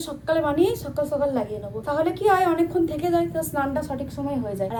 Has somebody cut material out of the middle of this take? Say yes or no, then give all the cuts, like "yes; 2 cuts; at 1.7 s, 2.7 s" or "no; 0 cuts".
no; 0 cuts